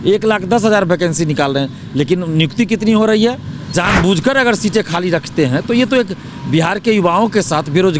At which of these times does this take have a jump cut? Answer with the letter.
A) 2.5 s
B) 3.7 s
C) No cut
B